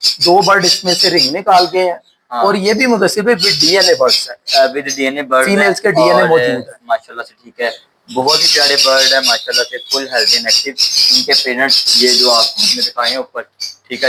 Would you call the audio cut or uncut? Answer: uncut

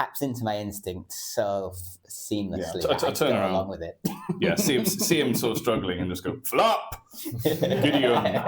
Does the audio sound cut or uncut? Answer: uncut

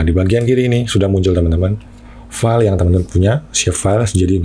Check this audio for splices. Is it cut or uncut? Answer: uncut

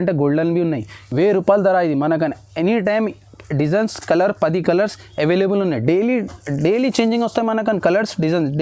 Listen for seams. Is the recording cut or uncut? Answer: uncut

